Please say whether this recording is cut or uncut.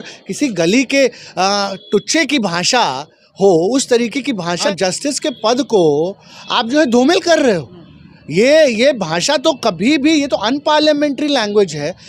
uncut